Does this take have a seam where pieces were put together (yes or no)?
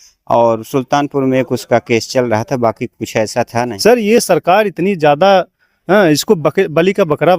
yes